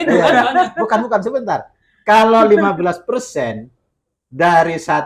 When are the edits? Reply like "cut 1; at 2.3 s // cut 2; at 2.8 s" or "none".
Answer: none